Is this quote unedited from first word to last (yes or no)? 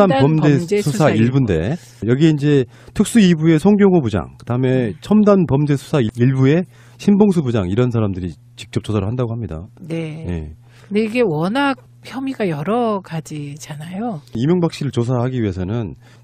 yes